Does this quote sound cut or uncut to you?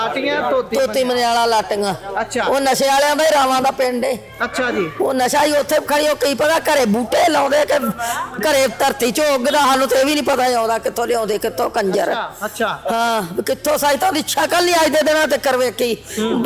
uncut